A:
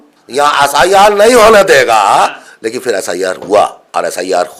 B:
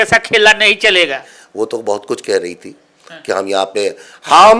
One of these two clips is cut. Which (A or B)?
B